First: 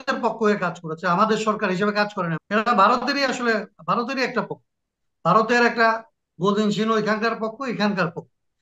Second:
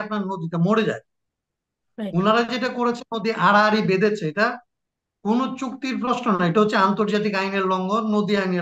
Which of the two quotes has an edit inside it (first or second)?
first